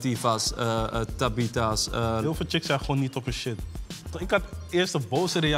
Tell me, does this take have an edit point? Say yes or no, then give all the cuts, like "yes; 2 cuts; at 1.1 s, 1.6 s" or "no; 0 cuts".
yes; 2 cuts; at 2.2 s, 4.2 s